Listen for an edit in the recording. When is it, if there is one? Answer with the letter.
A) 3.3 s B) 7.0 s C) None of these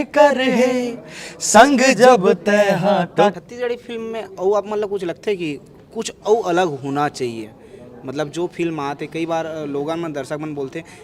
A